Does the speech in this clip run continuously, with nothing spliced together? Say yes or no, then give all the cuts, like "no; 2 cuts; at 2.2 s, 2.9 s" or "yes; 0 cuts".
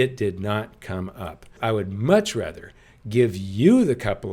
no; 1 cut; at 1.5 s